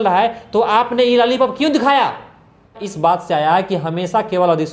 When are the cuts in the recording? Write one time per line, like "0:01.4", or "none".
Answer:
0:02.9

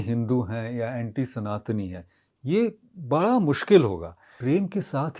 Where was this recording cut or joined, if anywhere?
0:04.3

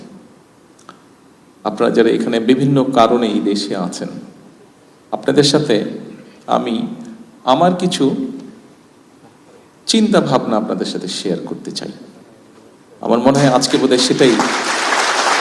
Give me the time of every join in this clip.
none

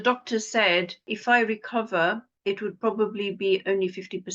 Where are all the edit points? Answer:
0:01.1
0:02.3

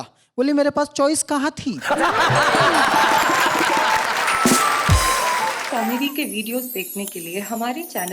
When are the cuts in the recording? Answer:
0:05.6

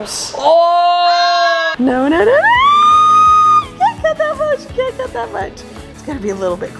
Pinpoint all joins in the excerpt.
0:01.7

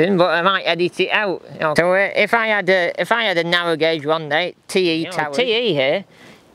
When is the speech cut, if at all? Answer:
0:01.7
0:05.3

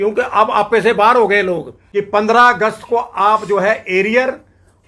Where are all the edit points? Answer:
0:01.7

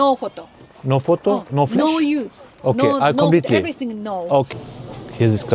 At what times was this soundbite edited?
0:04.5

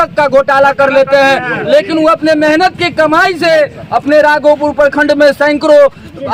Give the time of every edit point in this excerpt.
none

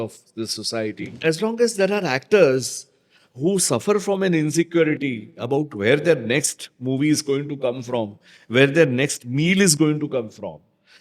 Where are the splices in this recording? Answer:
0:01.0

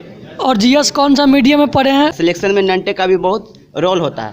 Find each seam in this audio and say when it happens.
0:02.1

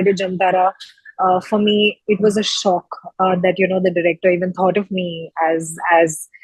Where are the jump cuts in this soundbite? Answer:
none

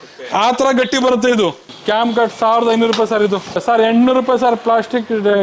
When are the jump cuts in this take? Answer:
0:01.7
0:03.5

